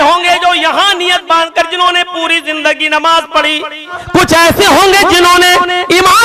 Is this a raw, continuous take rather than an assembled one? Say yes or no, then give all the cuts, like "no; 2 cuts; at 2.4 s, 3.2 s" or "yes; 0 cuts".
no; 1 cut; at 4.0 s